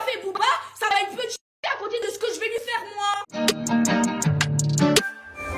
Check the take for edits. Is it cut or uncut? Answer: cut